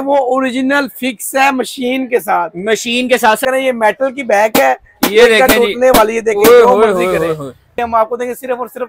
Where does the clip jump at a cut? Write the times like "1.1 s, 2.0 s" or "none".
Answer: 3.4 s, 7.8 s